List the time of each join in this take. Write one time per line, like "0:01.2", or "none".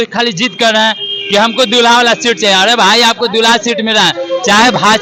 none

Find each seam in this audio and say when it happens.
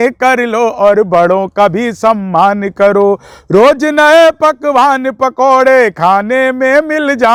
none

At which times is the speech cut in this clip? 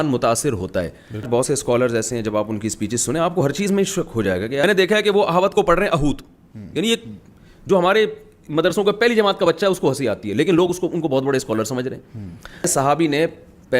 0:01.3
0:04.6
0:12.7

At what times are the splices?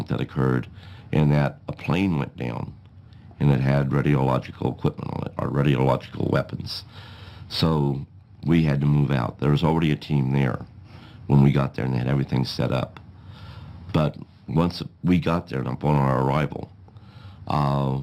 0:14.1

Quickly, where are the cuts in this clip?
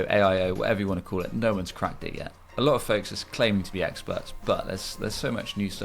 none

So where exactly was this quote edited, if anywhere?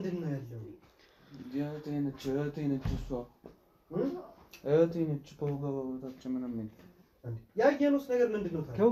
none

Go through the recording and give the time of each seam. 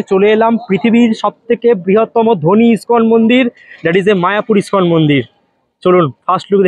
none

